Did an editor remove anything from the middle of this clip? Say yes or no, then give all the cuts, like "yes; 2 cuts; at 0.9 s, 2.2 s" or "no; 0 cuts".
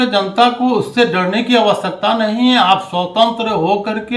no; 0 cuts